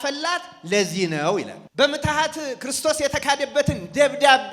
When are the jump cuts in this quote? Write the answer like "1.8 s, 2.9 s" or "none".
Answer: 1.6 s

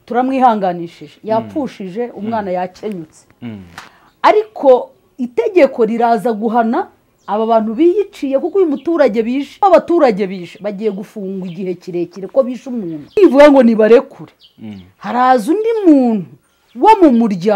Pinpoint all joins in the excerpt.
9.5 s, 13.2 s

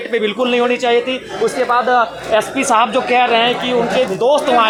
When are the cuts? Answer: none

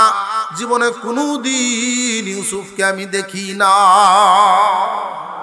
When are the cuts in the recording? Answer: none

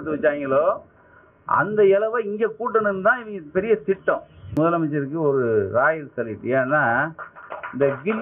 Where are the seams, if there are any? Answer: 4.5 s

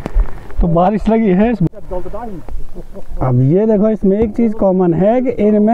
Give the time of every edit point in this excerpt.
1.7 s

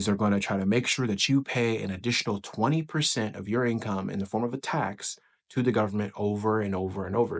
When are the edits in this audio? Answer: none

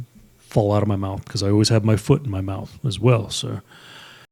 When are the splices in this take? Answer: none

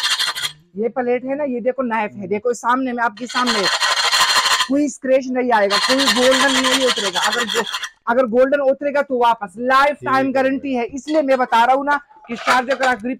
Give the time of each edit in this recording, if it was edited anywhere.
none

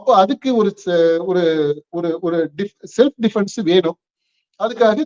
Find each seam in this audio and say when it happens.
none

